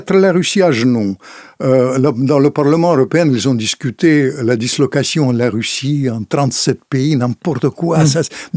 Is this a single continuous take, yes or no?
yes